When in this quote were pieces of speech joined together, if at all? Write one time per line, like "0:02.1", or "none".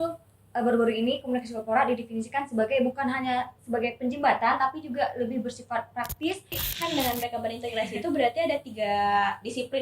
0:06.6